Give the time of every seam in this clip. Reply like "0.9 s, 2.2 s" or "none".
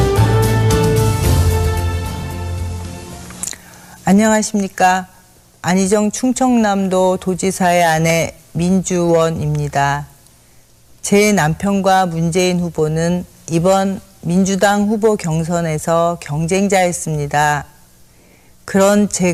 none